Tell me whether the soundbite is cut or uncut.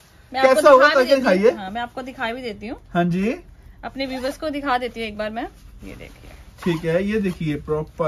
uncut